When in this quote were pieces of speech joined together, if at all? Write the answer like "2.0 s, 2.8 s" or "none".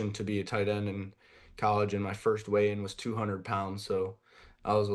none